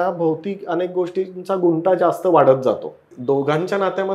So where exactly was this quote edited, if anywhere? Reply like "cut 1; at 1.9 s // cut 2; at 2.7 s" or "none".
cut 1; at 3.1 s